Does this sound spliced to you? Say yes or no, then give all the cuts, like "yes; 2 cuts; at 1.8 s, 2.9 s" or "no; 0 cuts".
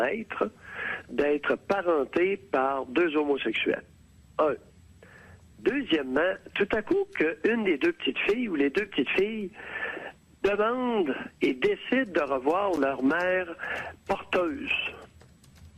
yes; 1 cut; at 8.6 s